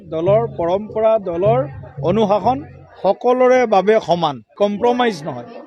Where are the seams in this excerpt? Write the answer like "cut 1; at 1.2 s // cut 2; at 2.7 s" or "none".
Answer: cut 1; at 4.4 s